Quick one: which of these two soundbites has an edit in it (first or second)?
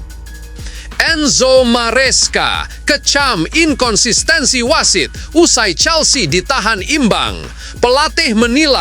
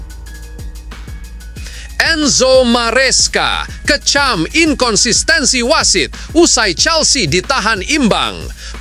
first